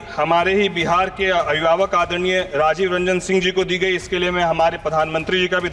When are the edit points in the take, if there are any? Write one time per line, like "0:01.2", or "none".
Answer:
none

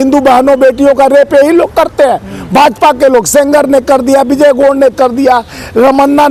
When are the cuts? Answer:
none

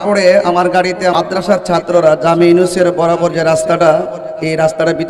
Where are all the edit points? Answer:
0:01.1

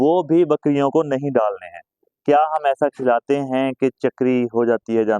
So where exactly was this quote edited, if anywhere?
0:02.2

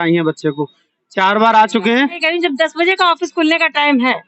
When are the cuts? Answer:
0:02.1

